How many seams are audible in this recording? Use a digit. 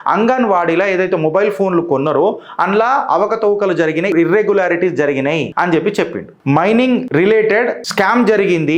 5